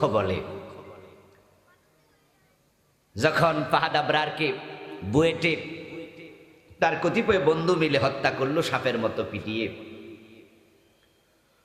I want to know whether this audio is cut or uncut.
uncut